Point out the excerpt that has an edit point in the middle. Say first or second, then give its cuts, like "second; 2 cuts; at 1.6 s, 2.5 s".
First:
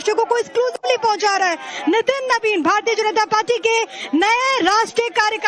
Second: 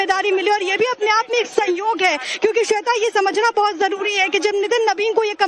second; 1 cut; at 4.2 s